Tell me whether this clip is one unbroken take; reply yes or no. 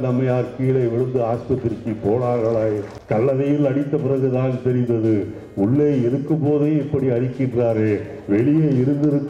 no